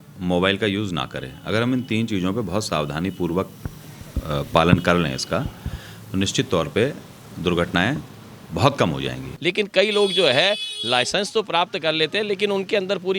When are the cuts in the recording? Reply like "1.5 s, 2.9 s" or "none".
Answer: 9.3 s